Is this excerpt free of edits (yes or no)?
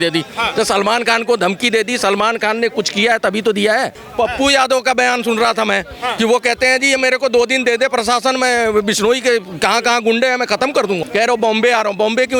no